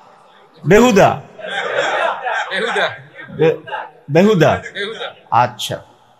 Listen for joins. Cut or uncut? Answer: uncut